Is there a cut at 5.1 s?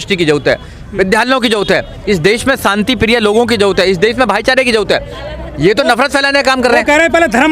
no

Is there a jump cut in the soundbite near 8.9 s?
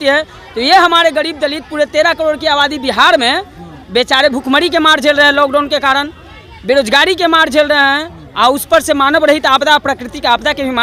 no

